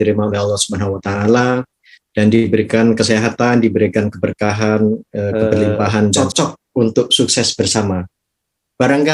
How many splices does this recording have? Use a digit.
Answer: 1